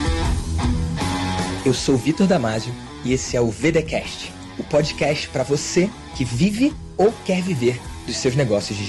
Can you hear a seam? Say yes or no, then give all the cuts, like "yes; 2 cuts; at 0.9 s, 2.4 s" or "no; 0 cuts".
no; 0 cuts